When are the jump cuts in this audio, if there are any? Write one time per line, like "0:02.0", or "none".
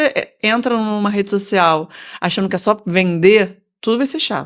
none